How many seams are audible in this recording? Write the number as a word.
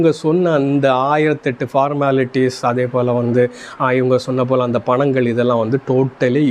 zero